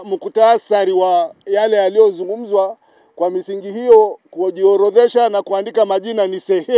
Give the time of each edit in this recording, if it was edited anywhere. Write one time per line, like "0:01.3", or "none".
none